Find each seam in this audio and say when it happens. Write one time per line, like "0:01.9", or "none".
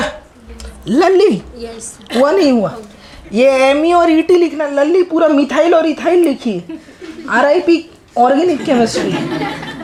none